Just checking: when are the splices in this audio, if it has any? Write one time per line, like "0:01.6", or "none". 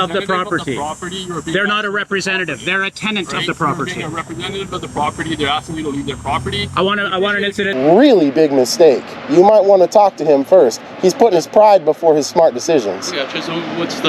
0:07.7